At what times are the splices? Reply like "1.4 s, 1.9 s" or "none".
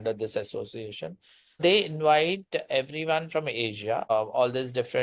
1.6 s, 4.1 s